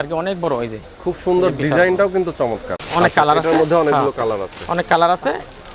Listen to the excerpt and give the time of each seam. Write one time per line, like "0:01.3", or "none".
0:02.7